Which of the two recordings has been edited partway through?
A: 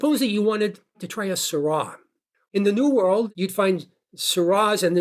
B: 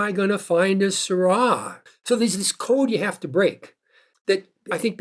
A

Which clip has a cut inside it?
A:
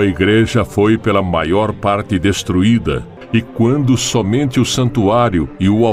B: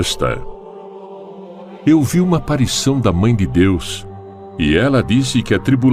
A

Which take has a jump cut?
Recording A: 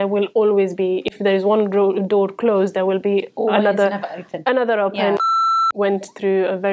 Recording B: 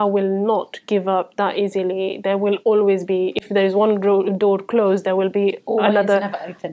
A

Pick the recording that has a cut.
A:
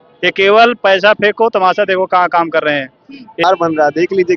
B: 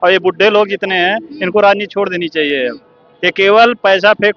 A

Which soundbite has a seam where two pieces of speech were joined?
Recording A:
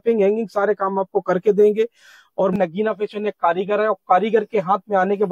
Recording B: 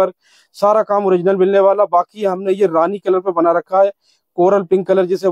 A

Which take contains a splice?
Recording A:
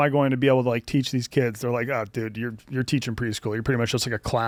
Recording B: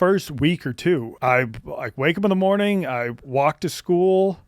B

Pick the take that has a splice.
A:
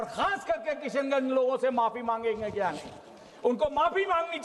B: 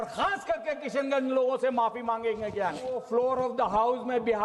B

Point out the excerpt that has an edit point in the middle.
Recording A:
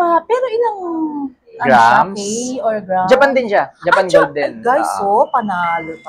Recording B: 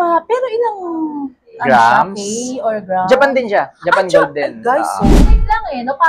B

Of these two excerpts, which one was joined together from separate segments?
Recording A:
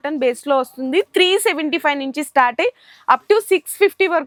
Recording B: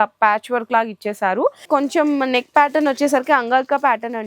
B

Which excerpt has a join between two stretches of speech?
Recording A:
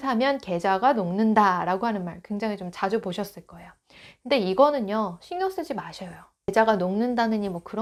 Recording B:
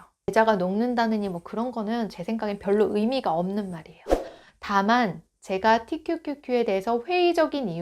B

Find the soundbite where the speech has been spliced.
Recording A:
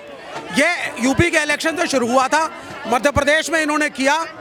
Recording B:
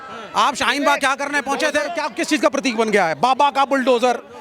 B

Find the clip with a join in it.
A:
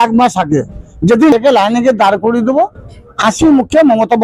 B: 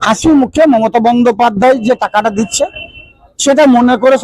A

